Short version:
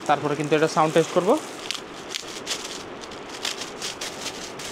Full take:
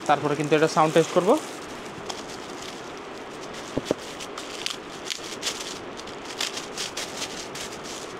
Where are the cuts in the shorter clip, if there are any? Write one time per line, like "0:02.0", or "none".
0:01.6